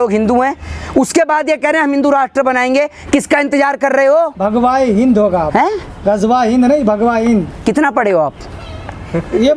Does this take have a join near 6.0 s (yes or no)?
no